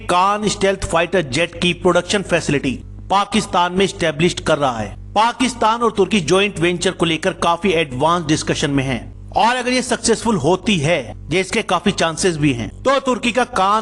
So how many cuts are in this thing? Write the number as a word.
zero